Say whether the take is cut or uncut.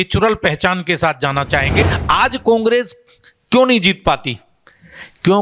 cut